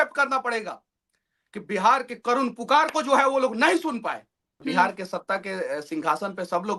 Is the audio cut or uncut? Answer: cut